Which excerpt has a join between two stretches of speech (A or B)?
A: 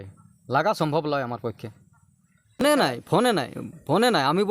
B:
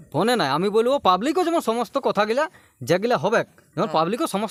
A